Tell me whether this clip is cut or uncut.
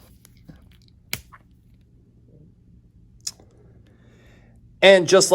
cut